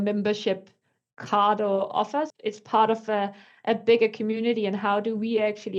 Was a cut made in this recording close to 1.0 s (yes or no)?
no